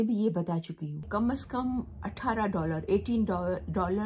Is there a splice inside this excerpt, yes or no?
yes